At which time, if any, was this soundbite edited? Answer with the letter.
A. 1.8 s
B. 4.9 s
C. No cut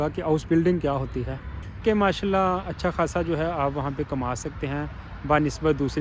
A